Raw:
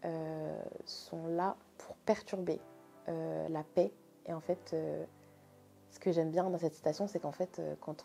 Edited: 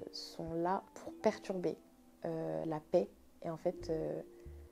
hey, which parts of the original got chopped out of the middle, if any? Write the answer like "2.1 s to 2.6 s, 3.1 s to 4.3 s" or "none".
1.7 s to 1.8 s